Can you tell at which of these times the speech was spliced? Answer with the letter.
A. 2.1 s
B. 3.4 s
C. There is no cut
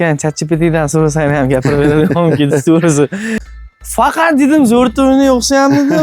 B